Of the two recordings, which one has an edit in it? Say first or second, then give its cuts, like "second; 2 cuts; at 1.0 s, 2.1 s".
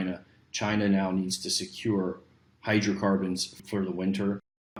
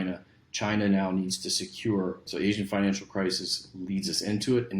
second; 1 cut; at 2.2 s